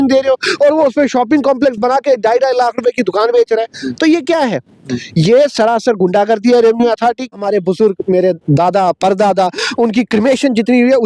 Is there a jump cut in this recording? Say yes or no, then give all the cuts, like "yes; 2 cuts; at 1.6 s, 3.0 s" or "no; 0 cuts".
yes; 1 cut; at 7.3 s